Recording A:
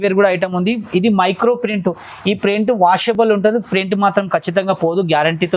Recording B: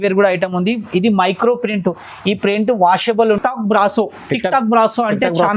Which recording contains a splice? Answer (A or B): B